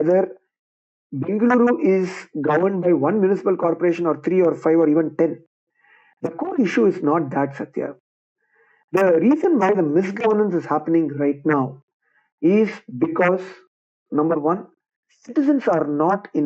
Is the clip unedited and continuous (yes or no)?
yes